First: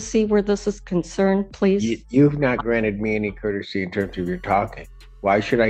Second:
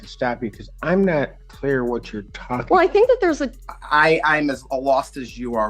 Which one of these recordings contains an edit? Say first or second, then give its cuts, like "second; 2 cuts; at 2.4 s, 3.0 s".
second; 1 cut; at 3.5 s